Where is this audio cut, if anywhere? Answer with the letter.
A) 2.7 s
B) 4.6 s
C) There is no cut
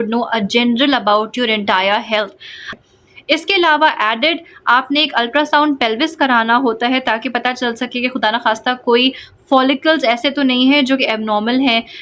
A